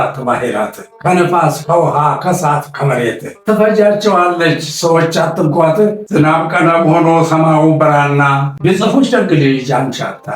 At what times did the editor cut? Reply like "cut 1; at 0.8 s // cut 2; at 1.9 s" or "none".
cut 1; at 8.5 s

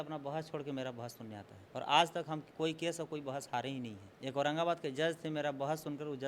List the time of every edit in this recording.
cut 1; at 1.6 s // cut 2; at 2.5 s // cut 3; at 4.0 s

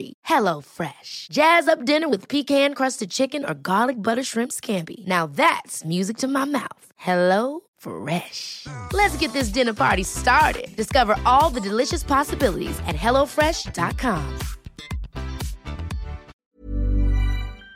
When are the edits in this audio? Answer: cut 1; at 16.3 s

